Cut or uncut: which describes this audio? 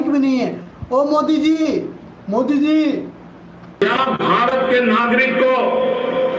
cut